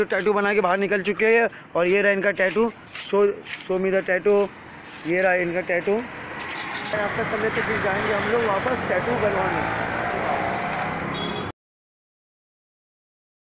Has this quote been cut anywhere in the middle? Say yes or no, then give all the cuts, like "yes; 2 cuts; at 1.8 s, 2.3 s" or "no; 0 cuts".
no; 0 cuts